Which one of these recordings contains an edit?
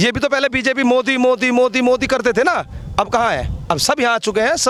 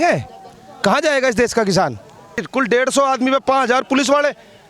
second; 1 cut; at 2.4 s

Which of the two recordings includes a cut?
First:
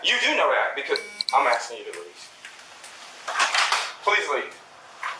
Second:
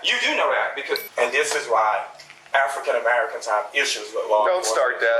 second; 1 cut; at 1.1 s

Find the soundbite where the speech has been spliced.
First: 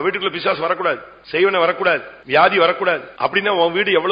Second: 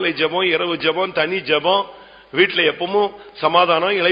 first; 3 cuts; at 1.1 s, 2.1 s, 3.1 s

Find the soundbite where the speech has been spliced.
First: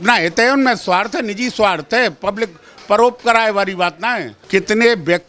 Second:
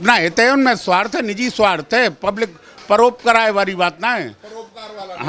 first; 1 cut; at 4.3 s

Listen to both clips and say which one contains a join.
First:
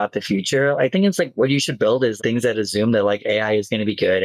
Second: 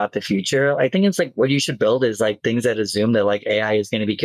first; 1 cut; at 2.2 s

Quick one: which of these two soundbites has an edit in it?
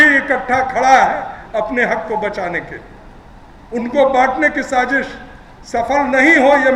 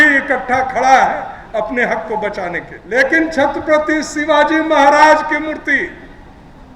second; 1 cut; at 2.7 s

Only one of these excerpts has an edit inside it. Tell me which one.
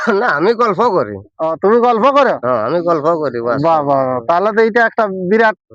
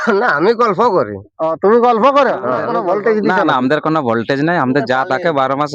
second; 1 cut; at 2.7 s

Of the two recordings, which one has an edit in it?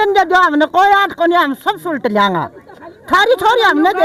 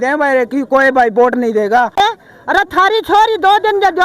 second; 1 cut; at 1.9 s

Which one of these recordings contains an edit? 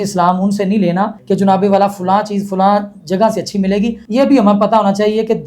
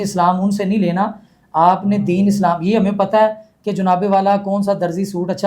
first; 2 cuts; at 1.2 s, 4.0 s

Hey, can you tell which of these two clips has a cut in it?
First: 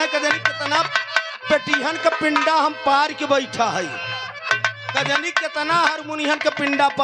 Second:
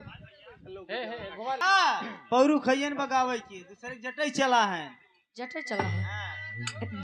second; 1 cut; at 1.5 s

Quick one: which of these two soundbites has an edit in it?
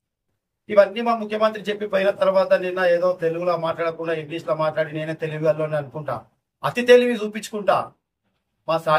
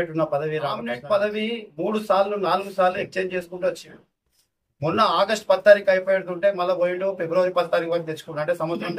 second; 1 cut; at 0.9 s

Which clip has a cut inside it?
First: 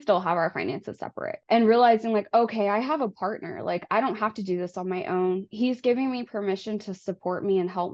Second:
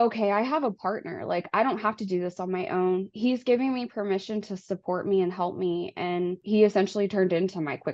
first; 1 cut; at 1.3 s

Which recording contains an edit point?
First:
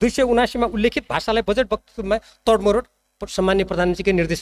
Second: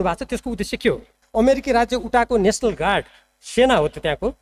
second; 1 cut; at 1.1 s

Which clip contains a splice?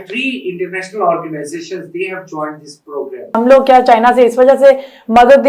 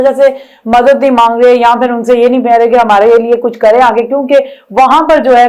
first; 1 cut; at 3.4 s

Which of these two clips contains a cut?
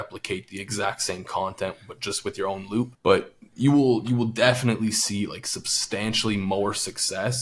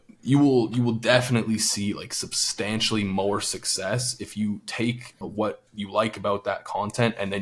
second; 1 cut; at 5.3 s

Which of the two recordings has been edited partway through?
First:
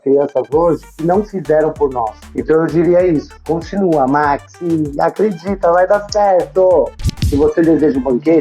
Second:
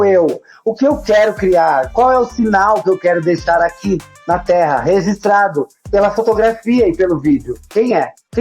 first; 1 cut; at 7.2 s

